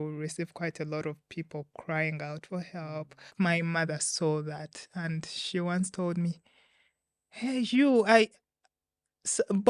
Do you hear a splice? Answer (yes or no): yes